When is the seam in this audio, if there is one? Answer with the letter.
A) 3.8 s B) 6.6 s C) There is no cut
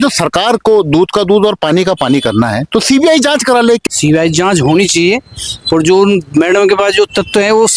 A